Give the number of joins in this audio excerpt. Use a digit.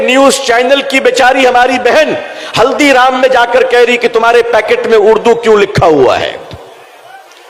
0